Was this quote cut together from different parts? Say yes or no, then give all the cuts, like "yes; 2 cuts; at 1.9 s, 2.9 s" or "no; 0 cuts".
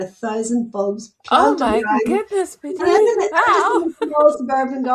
no; 0 cuts